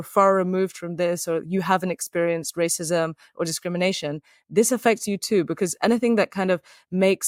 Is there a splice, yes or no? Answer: no